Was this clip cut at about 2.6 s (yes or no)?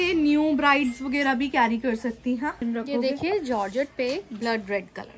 yes